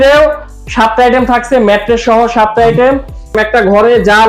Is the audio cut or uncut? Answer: cut